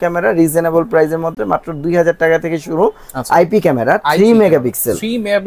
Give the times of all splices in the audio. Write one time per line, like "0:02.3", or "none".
none